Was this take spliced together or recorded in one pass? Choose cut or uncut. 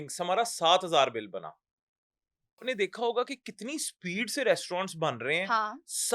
cut